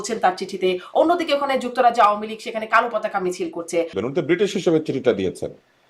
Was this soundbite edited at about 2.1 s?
no; 1 cut; at 4.0 s

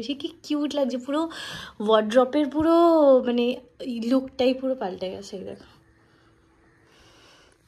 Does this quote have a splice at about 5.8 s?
no; 0 cuts

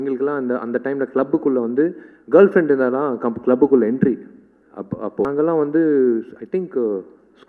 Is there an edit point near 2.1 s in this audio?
no; 1 cut; at 5.3 s

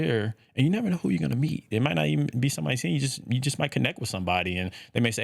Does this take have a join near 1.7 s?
yes; 1 cut; at 1.7 s

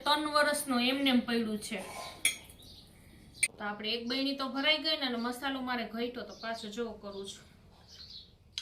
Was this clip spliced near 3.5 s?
yes; 1 cut; at 3.5 s

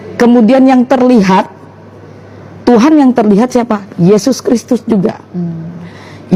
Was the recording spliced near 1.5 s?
no; 0 cuts

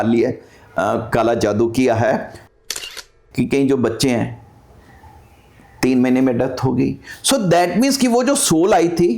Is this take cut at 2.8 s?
yes; 1 cut; at 2.8 s

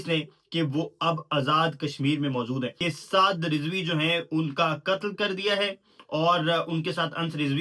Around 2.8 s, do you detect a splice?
yes; 1 cut; at 2.8 s

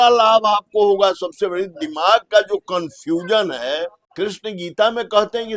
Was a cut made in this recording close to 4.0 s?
yes; 1 cut; at 4.0 s

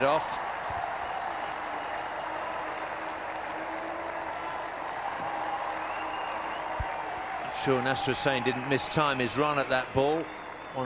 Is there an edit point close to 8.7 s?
yes; 1 cut; at 8.7 s

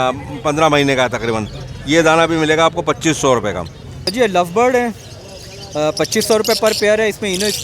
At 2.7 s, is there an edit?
no; 1 cut; at 4.1 s

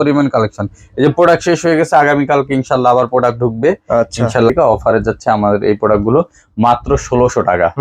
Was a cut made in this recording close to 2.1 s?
no; 1 cut; at 4.5 s

